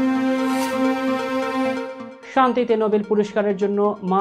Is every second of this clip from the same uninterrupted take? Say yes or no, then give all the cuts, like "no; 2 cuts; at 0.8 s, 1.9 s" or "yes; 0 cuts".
yes; 0 cuts